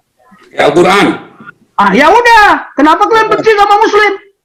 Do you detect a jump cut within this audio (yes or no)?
no